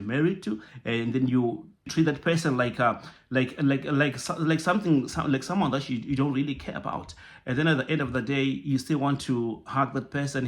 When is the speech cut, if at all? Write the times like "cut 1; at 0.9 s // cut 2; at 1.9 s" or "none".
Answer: cut 1; at 1.9 s